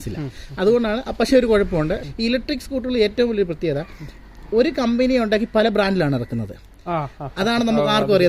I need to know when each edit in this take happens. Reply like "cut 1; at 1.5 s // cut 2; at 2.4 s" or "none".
cut 1; at 2.0 s

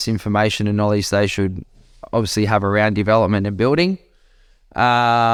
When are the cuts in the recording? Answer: none

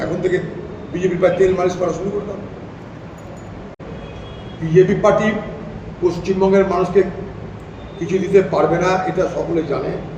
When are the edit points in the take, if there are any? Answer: cut 1; at 3.8 s

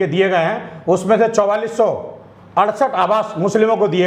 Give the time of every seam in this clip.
none

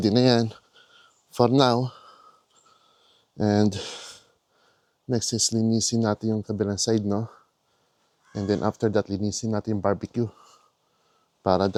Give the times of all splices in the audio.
none

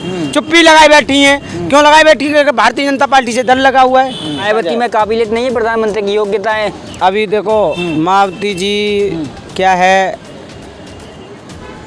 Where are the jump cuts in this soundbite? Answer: cut 1; at 4.4 s

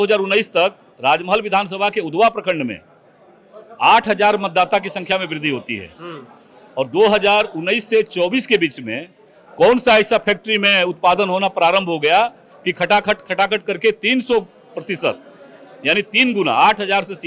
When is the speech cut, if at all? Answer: none

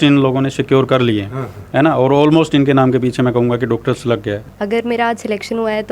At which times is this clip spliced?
cut 1; at 4.5 s

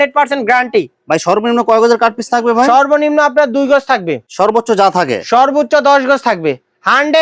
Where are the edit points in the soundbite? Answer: none

